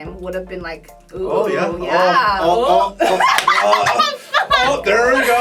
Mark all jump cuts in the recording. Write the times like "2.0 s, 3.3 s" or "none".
none